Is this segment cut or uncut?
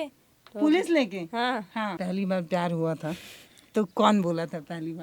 cut